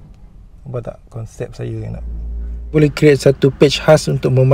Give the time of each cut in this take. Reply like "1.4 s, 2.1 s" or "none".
2.7 s

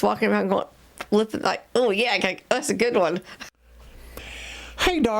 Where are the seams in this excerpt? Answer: 3.4 s

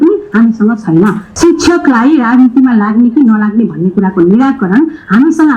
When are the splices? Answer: 1.2 s

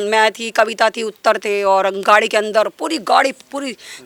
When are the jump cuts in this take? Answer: none

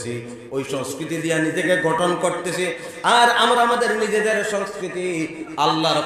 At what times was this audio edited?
none

